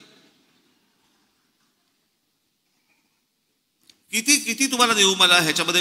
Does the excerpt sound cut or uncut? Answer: uncut